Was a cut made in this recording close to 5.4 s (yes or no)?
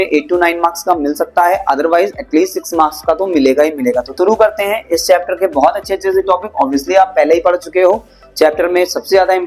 no